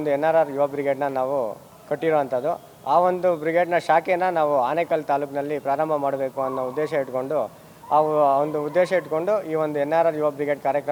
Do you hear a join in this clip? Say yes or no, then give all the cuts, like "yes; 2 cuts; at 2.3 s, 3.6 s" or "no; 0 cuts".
no; 0 cuts